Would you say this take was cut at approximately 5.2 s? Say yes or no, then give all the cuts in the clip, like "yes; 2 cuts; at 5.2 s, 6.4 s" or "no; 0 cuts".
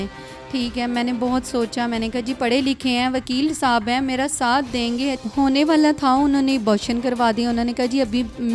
yes; 1 cut; at 5.2 s